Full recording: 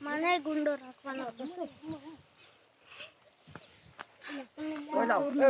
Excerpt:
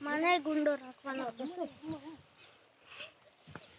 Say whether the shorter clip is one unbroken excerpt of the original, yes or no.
yes